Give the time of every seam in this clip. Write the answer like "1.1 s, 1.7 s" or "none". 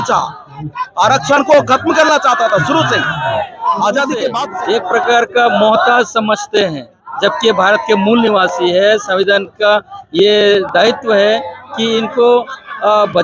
4.5 s